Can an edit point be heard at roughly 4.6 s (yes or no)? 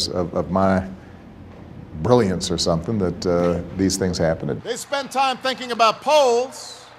yes